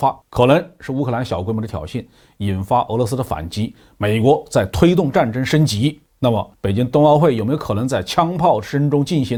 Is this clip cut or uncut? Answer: uncut